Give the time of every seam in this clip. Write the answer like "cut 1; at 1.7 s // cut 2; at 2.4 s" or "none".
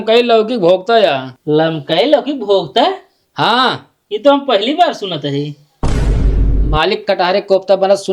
cut 1; at 1.3 s